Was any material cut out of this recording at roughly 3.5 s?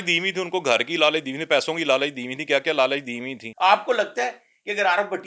yes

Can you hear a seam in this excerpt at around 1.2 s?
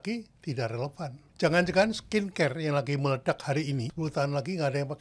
yes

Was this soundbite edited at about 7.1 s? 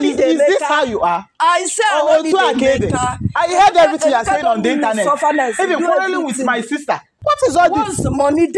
yes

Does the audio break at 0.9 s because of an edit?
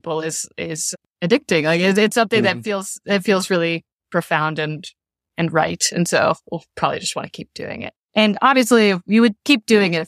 yes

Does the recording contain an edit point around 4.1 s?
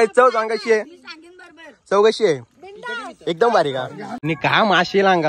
yes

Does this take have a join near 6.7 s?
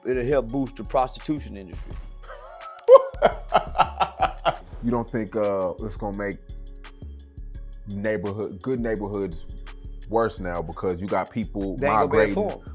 no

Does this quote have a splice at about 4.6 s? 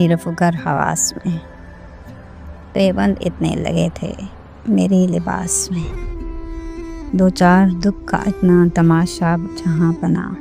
yes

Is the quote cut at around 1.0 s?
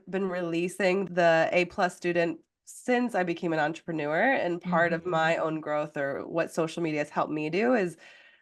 yes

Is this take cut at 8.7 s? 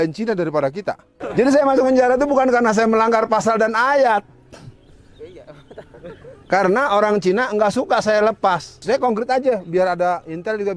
yes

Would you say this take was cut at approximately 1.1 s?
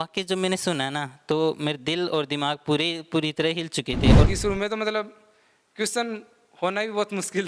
no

